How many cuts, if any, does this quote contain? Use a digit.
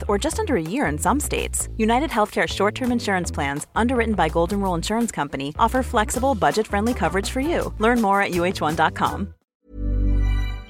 1